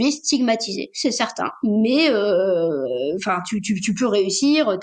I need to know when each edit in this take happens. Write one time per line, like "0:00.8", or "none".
none